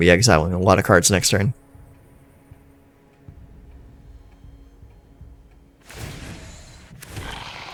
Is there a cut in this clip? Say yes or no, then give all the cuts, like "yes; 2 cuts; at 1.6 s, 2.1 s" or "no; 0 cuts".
no; 0 cuts